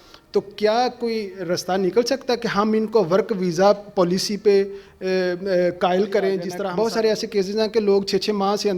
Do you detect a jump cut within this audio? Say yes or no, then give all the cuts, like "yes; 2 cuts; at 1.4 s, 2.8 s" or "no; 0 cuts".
yes; 1 cut; at 6.5 s